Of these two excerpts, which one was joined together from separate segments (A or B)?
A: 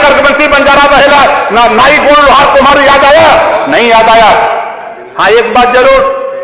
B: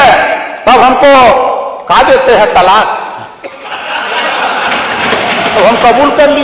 A